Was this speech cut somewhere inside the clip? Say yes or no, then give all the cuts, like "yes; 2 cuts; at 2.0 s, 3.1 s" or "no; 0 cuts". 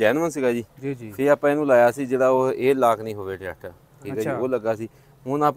no; 0 cuts